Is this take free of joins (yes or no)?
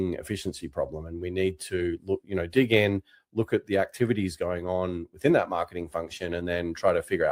yes